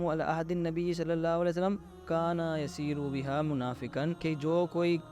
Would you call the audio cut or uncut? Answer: cut